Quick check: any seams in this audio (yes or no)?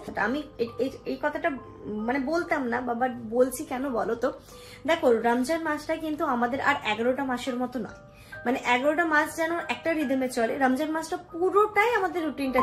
no